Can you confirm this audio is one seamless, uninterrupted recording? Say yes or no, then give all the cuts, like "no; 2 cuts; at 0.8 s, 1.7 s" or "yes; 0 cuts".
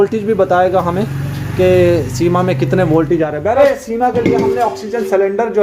no; 1 cut; at 3.6 s